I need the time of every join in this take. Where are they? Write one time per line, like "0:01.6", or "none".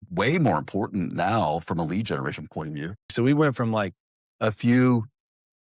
0:03.1